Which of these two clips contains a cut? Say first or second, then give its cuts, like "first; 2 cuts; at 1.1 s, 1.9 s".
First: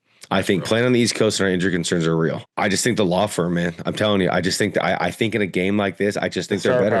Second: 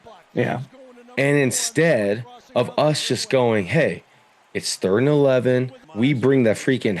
second; 1 cut; at 5.8 s